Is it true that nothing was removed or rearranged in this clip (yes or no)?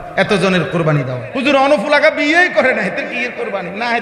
no